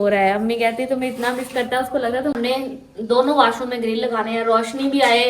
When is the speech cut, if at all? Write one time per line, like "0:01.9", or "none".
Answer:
0:02.4